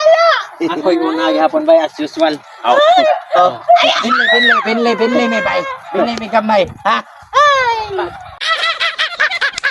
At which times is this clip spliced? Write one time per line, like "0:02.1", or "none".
0:08.4